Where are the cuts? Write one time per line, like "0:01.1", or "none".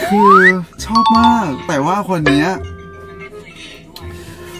none